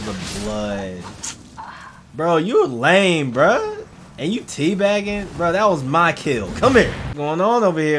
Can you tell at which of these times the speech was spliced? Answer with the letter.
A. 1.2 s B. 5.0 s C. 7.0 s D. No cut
C